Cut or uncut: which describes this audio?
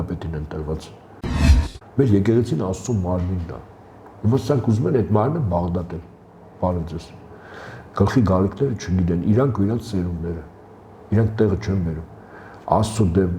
cut